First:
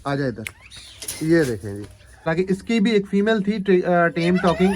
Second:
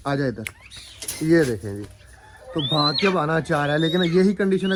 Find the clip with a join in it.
first; 1 cut; at 2.3 s

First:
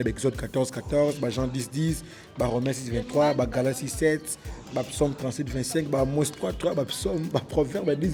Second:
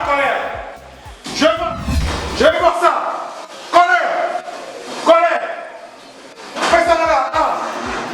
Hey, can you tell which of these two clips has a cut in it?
second; 1 cut; at 1.9 s

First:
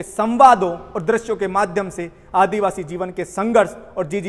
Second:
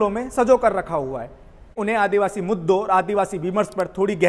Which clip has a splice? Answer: second; 1 cut; at 1.8 s

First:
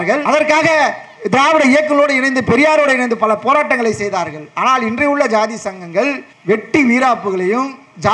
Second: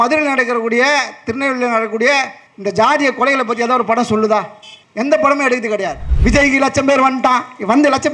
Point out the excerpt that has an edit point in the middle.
second; 1 cut; at 6.0 s

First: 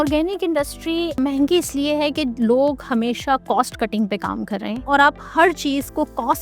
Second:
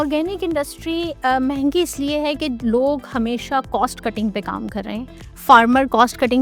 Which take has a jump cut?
first; 2 cuts; at 1.2 s, 4.8 s

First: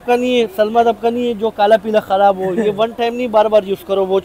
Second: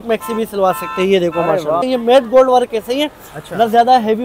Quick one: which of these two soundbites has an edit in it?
second; 1 cut; at 1.8 s

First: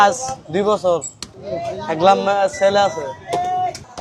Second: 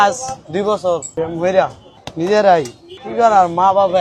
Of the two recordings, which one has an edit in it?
second; 2 cuts; at 1.1 s, 1.8 s

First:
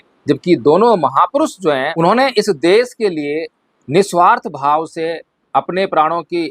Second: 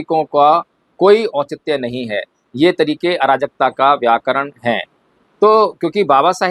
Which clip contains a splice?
first; 1 cut; at 1.9 s

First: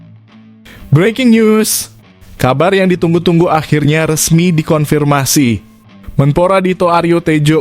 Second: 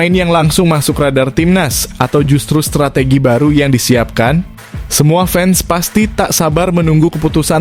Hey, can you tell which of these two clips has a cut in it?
first; 1 cut; at 0.9 s

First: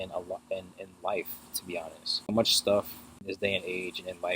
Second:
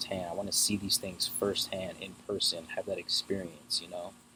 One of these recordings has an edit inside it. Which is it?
first; 2 cuts; at 2.3 s, 3.2 s

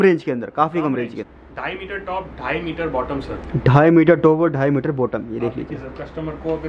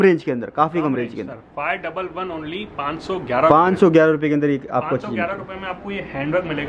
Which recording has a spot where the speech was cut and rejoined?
first; 1 cut; at 1.4 s

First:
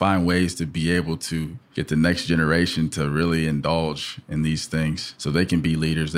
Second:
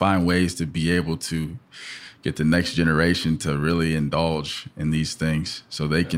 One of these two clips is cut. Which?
first; 2 cuts; at 1.6 s, 5.1 s

